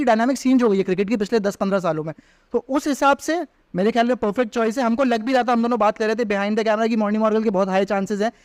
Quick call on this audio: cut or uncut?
uncut